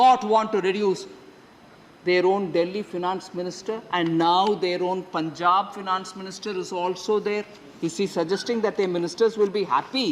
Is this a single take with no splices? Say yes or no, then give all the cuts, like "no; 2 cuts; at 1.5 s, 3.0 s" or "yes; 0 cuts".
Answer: yes; 0 cuts